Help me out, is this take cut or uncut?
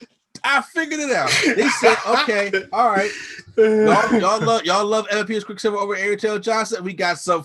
uncut